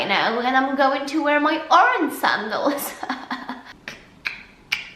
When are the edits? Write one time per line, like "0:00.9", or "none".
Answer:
0:03.6